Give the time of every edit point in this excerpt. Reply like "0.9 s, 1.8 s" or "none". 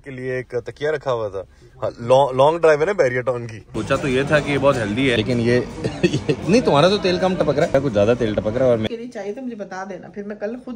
3.7 s, 5.2 s, 7.7 s, 8.9 s